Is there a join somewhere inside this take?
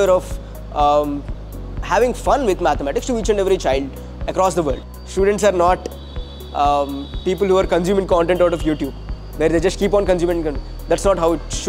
yes; 1 cut; at 4.9 s

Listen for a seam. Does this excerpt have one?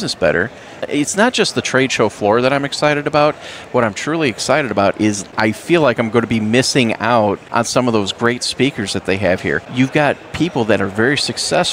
yes; 4 cuts; at 0.9 s, 5.3 s, 7.4 s, 9.6 s

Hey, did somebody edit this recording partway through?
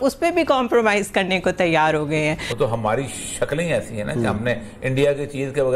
yes; 1 cut; at 2.5 s

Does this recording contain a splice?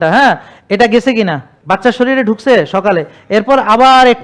yes; 1 cut; at 1.5 s

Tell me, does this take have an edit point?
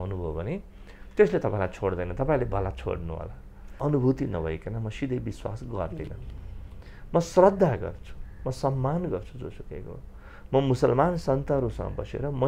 yes; 1 cut; at 3.8 s

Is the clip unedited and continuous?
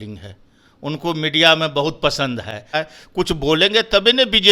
no; 1 cut; at 2.7 s

